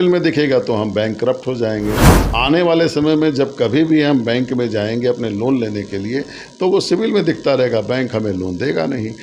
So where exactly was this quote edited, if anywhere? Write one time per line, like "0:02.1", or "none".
none